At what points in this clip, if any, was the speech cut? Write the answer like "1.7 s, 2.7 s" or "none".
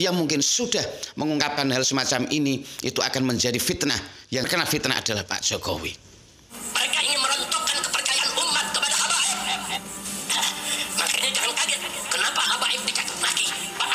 6.4 s